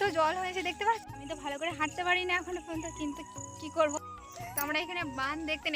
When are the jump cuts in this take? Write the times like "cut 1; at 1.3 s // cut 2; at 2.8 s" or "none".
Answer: cut 1; at 1.0 s // cut 2; at 4.1 s

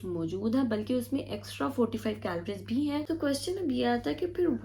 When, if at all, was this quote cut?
cut 1; at 3.1 s

